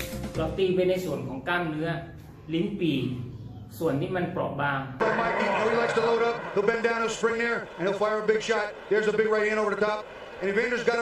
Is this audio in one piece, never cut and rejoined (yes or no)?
no